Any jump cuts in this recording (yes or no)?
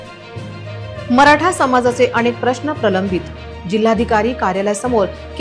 yes